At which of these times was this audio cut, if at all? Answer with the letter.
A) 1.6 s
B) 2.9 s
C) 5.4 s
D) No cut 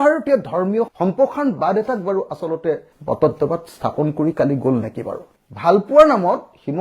C